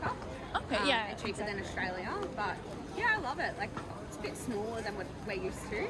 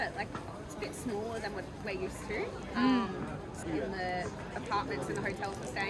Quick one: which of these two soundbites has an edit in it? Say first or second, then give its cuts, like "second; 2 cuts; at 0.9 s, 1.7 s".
second; 1 cut; at 3.6 s